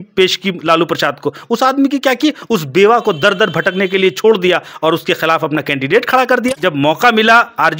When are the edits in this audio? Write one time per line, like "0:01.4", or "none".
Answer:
0:06.6